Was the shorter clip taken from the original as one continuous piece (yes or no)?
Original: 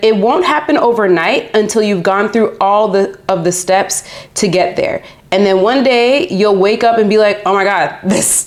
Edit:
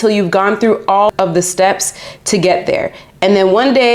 no